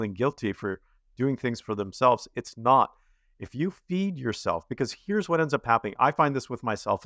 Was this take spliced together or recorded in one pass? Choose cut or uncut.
uncut